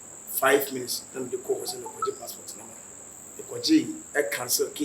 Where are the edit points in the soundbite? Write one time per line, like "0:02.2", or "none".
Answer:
0:03.0